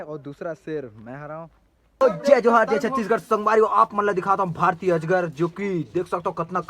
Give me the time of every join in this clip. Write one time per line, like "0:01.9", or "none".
0:02.0